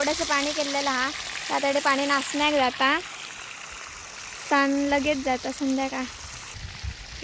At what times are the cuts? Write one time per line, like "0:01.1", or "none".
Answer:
none